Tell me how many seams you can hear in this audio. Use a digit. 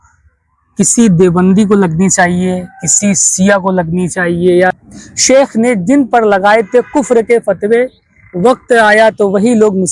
1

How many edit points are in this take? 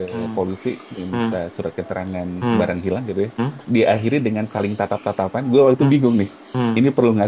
1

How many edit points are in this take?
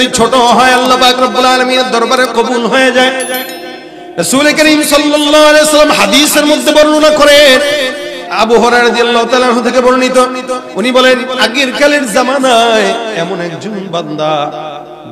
1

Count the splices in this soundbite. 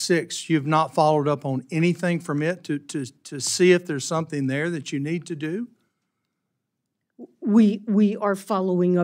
0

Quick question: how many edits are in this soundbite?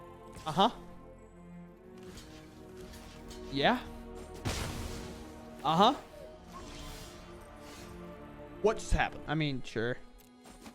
1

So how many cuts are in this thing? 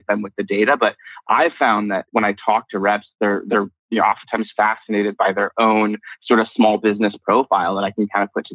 1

